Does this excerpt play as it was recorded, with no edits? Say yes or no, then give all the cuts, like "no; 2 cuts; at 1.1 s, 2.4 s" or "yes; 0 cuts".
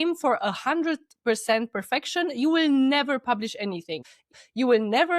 no; 1 cut; at 4.2 s